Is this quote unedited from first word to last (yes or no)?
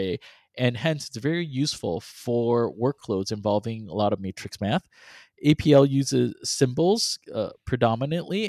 yes